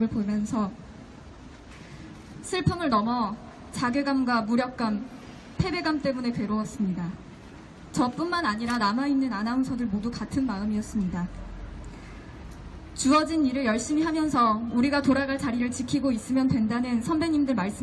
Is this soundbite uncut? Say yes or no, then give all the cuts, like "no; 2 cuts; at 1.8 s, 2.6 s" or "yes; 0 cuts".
no; 1 cut; at 16.8 s